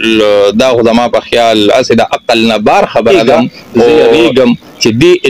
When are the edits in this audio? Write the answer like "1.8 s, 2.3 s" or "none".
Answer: 4.2 s